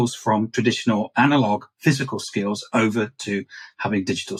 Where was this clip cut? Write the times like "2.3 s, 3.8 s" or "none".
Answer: none